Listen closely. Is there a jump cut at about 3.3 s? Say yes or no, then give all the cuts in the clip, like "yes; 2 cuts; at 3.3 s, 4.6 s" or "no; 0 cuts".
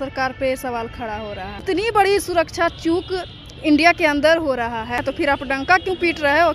no; 2 cuts; at 1.6 s, 5.1 s